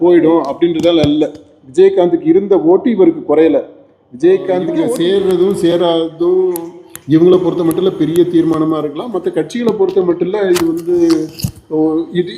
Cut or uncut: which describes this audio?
cut